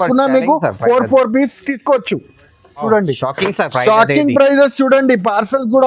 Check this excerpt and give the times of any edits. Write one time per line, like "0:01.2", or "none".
0:02.8